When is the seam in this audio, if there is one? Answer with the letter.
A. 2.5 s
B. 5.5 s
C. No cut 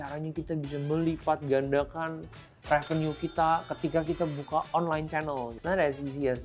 B